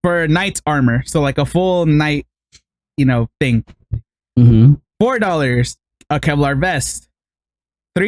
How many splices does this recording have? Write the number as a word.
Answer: zero